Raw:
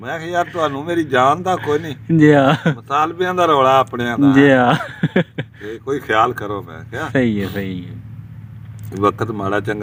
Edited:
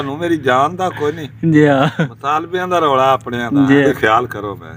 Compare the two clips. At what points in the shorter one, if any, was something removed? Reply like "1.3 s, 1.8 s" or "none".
3.8 s